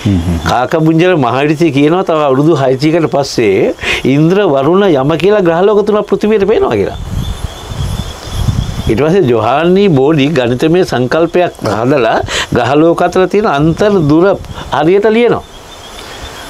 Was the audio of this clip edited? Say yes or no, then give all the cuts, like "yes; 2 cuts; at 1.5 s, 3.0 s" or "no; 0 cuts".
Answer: no; 0 cuts